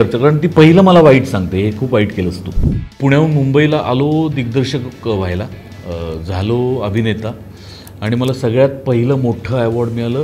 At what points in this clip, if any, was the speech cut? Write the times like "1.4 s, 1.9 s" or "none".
2.8 s